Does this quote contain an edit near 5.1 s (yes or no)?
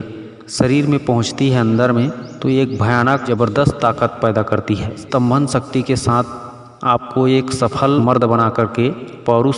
yes